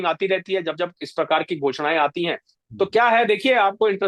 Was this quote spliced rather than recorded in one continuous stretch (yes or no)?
no